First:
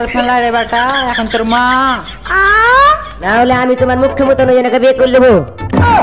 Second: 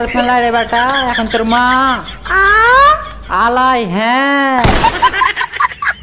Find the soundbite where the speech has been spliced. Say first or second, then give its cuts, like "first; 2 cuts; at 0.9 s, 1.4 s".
first; 1 cut; at 3.3 s